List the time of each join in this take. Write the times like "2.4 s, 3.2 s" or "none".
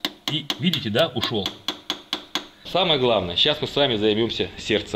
2.5 s